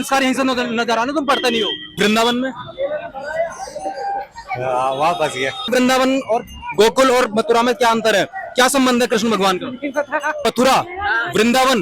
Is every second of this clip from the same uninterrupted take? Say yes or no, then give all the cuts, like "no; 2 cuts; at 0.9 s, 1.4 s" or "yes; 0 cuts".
no; 3 cuts; at 1.9 s, 5.7 s, 10.4 s